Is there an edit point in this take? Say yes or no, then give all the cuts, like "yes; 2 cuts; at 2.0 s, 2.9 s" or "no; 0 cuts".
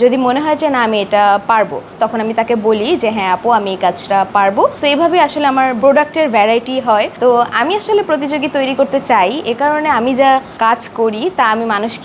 yes; 3 cuts; at 1.9 s, 4.7 s, 7.1 s